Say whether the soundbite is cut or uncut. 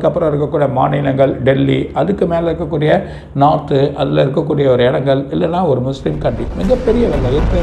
uncut